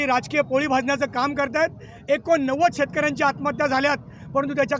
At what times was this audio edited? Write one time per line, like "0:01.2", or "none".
none